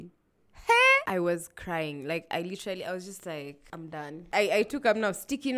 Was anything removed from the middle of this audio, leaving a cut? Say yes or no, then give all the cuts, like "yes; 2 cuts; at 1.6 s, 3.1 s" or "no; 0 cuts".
yes; 2 cuts; at 1.0 s, 4.2 s